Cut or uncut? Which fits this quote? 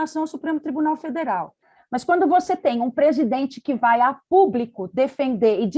cut